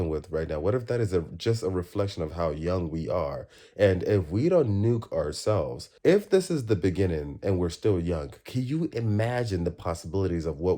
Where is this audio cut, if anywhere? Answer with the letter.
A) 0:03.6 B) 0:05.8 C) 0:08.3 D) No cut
B